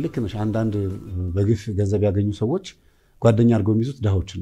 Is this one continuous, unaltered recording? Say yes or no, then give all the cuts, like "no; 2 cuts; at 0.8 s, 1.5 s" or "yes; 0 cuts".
yes; 0 cuts